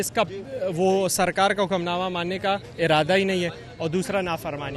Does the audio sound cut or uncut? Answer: uncut